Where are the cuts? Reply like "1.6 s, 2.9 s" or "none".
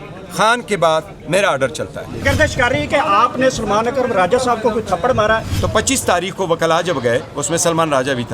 2.2 s, 5.5 s